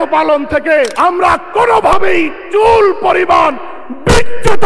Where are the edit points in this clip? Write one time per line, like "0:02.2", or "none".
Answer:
0:00.9